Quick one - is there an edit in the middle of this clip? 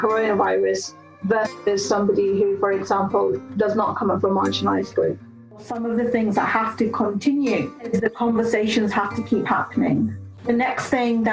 yes; 3 cuts; at 5.7 s, 7.8 s, 10.3 s

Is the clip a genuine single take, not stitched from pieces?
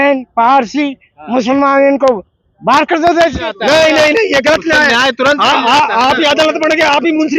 no; 1 cut; at 3.5 s

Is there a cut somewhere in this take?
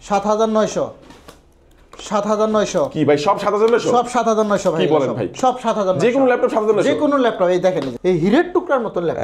yes; 1 cut; at 7.9 s

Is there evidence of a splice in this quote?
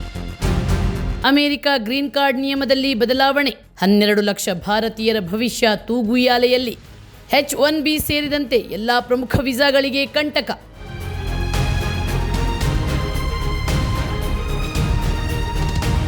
yes; 1 cut; at 1.2 s

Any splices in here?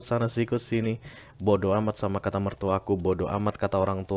no; 0 cuts

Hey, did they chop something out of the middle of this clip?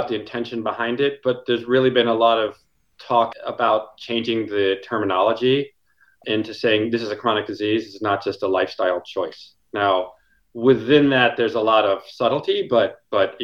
yes; 2 cuts; at 3.3 s, 6.2 s

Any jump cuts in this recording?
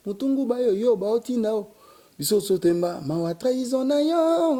no; 0 cuts

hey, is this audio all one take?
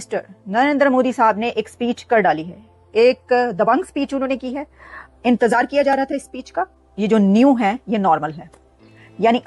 no; 1 cut; at 6.8 s

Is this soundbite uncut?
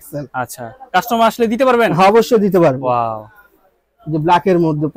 yes; 0 cuts

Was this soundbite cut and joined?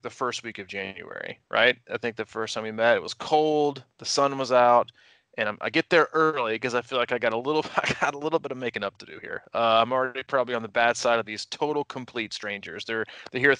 no; 0 cuts

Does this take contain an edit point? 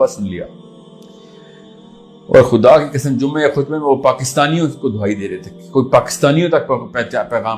no; 0 cuts

